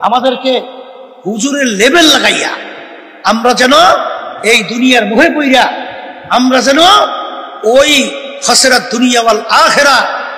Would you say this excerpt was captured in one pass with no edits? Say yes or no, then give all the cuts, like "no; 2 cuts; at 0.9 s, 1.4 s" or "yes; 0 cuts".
yes; 0 cuts